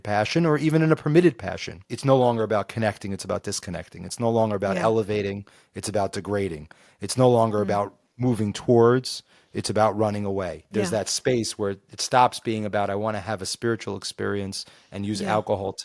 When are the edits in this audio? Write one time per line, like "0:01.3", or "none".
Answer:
none